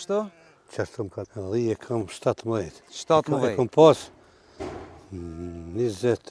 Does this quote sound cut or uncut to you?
cut